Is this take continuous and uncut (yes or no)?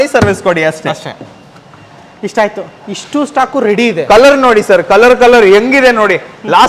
yes